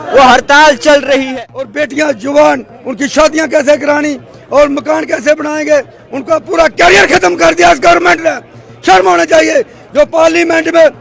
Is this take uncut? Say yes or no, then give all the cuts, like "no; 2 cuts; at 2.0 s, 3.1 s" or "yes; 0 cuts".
no; 1 cut; at 1.3 s